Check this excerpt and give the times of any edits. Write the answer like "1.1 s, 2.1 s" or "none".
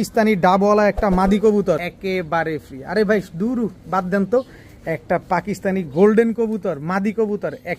1.8 s